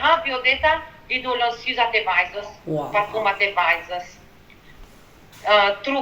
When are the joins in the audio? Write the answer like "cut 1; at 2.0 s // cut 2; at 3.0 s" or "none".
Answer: none